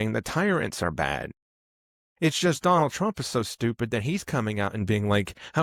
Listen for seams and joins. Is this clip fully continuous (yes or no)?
yes